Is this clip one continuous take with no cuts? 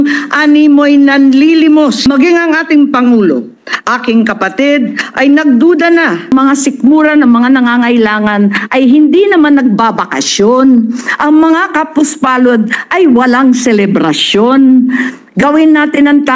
no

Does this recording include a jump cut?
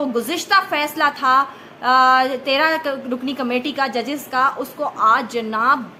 no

